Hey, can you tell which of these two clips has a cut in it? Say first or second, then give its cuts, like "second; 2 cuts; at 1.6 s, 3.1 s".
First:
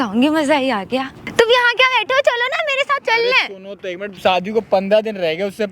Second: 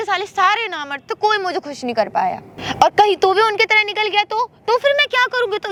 first; 2 cuts; at 1.2 s, 4.1 s